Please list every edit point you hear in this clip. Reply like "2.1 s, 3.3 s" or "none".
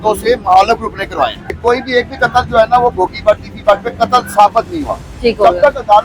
1.4 s